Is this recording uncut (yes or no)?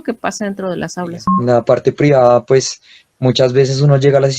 no